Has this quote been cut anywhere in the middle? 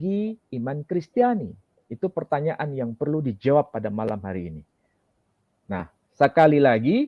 no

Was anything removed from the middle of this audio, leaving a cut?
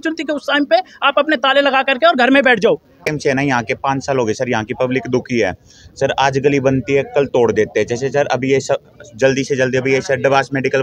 yes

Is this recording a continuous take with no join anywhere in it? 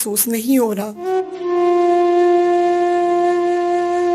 no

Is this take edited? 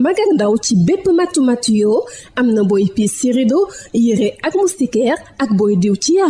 no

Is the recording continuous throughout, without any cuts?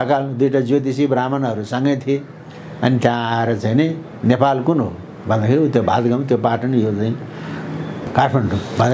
no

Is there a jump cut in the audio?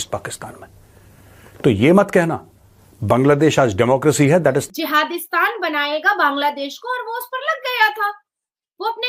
yes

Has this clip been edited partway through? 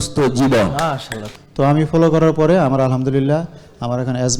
yes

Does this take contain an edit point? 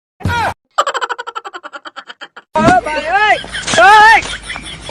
no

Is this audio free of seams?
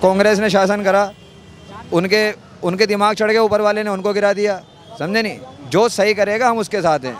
yes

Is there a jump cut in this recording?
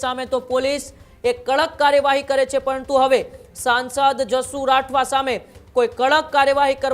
no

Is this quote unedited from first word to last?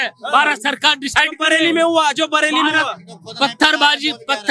yes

